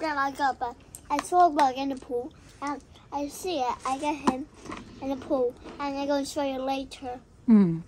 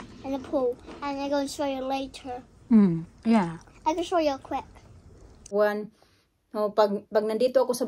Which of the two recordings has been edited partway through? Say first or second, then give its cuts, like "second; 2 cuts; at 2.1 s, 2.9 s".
second; 1 cut; at 5.4 s